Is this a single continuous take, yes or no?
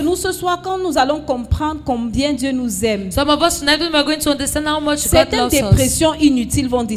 yes